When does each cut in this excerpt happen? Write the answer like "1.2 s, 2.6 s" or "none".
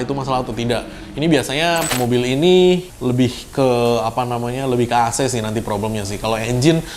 1.9 s